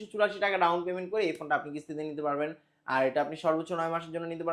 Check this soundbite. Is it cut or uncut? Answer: uncut